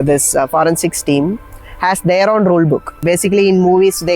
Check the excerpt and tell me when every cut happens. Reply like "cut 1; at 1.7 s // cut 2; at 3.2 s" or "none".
cut 1; at 3.0 s